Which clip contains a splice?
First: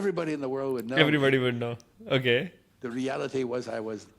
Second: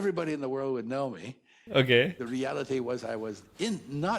second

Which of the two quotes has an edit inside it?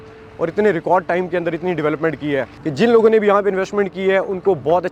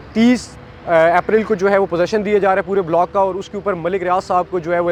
first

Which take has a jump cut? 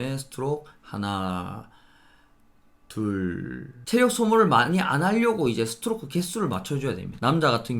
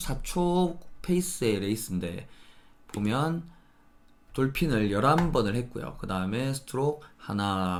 first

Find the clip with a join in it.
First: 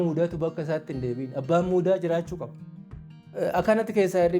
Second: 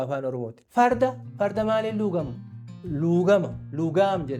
first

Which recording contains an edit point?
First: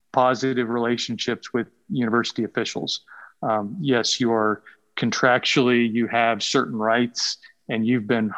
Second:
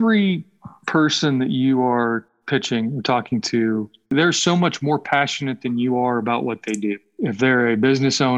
second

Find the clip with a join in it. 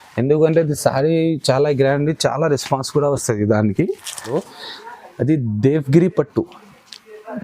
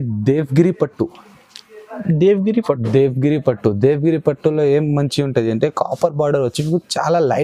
first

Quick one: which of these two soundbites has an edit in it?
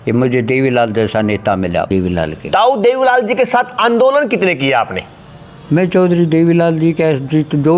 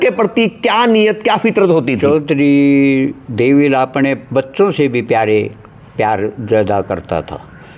first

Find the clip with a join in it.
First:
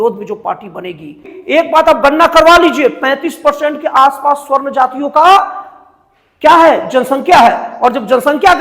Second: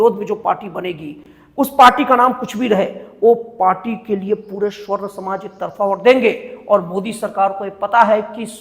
first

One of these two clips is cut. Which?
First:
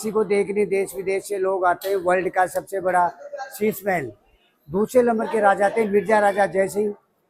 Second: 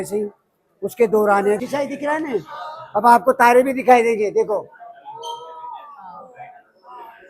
second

